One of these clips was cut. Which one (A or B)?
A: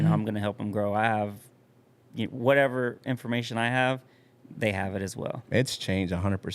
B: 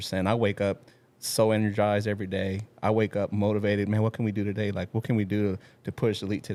A